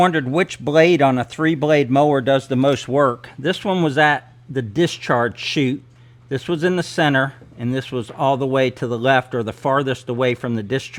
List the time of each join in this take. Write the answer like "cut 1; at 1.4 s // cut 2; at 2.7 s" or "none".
none